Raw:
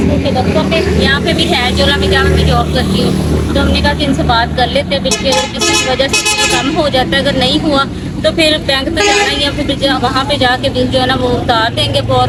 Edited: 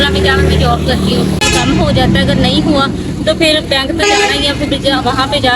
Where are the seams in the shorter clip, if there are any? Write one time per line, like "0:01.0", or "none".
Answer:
0:01.4